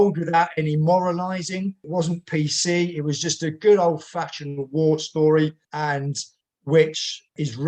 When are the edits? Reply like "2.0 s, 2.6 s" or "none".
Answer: none